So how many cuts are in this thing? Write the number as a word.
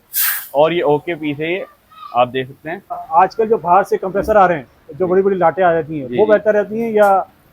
one